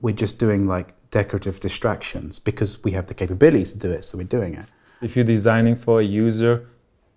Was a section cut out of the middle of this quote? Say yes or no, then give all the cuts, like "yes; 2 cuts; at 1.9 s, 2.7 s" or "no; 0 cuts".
yes; 1 cut; at 5.0 s